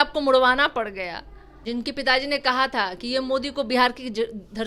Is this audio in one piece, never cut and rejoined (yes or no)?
no